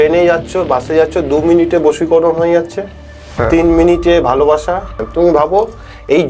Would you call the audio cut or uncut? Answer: cut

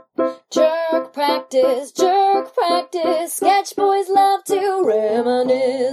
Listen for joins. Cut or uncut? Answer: uncut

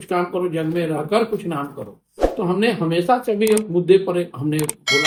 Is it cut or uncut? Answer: uncut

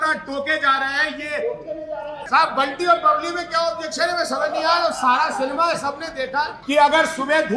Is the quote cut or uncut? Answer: cut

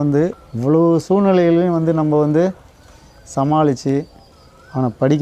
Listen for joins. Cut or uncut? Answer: cut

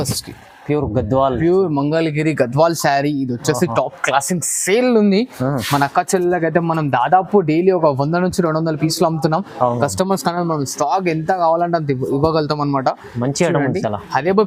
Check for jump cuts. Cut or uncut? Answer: uncut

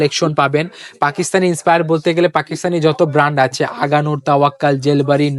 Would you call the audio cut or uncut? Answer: uncut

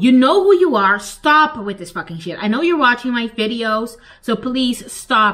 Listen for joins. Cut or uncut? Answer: uncut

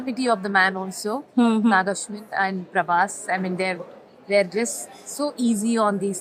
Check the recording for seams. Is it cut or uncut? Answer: uncut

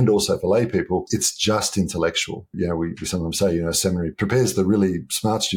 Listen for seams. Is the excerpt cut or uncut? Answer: cut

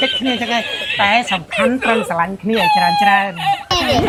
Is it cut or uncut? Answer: uncut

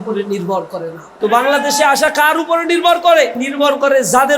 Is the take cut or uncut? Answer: cut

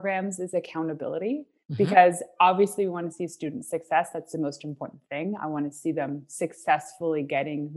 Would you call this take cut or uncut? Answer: uncut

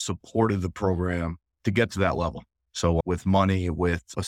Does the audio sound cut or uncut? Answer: cut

